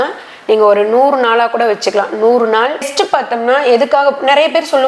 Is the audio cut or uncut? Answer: cut